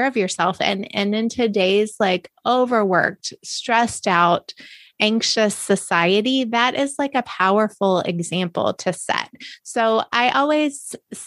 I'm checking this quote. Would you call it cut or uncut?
uncut